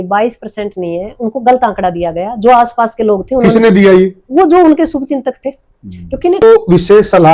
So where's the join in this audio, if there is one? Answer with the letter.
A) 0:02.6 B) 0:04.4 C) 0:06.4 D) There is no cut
C